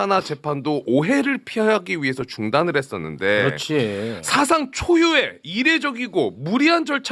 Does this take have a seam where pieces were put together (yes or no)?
no